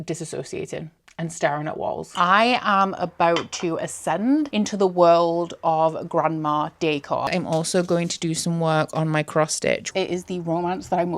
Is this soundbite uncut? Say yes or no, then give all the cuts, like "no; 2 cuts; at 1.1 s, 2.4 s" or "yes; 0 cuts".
no; 3 cuts; at 2.1 s, 7.3 s, 9.9 s